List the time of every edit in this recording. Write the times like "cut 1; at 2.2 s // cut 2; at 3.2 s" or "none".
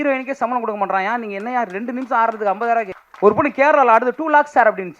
cut 1; at 3.0 s

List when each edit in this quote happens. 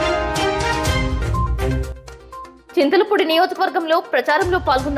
cut 1; at 2.6 s

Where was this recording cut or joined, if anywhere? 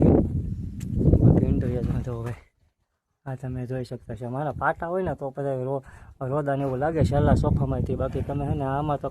cut 1; at 1.9 s

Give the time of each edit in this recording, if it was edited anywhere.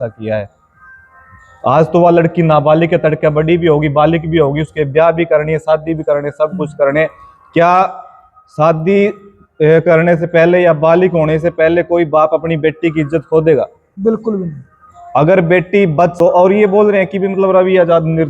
cut 1; at 16.1 s

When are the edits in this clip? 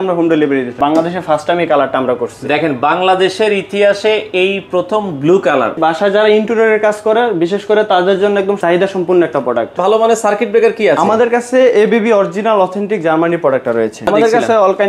cut 1; at 0.8 s // cut 2; at 5.8 s // cut 3; at 8.6 s // cut 4; at 9.8 s // cut 5; at 14.1 s

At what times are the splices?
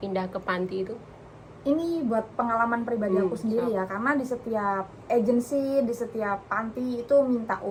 none

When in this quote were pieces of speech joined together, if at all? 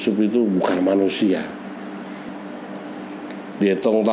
cut 1; at 2.2 s

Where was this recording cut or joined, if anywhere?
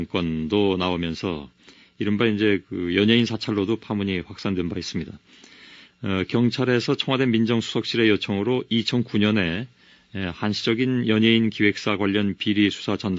none

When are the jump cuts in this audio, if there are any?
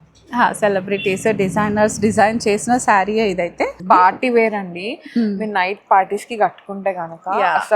cut 1; at 3.8 s

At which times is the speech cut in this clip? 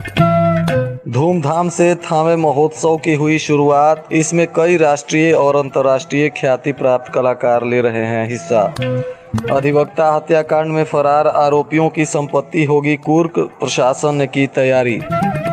cut 1; at 1.0 s

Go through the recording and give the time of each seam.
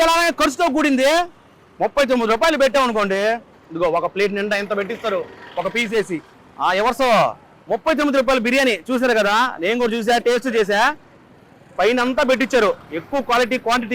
none

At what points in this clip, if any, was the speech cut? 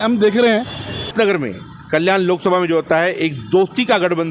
cut 1; at 1.1 s

